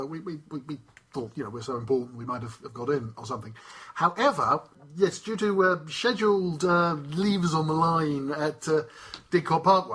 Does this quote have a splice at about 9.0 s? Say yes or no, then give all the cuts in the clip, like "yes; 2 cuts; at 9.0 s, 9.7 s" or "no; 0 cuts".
no; 1 cut; at 4.8 s